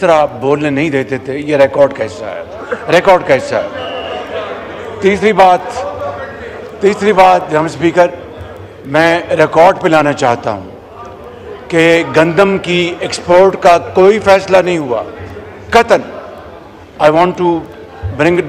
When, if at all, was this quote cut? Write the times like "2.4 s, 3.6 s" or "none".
none